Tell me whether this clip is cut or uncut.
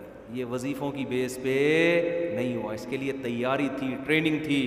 uncut